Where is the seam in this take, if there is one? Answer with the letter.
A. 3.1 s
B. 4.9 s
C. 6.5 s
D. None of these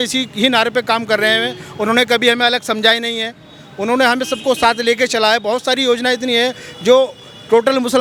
D